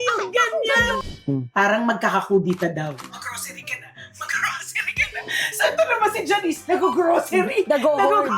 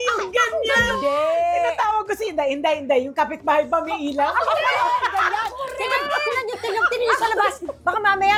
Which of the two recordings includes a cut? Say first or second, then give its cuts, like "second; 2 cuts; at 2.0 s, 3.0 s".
first; 2 cuts; at 1.0 s, 3.2 s